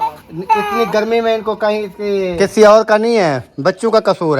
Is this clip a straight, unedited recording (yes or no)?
no